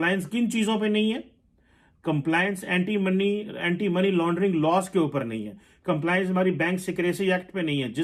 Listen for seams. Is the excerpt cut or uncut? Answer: uncut